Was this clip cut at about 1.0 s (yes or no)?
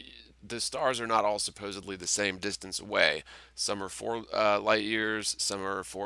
no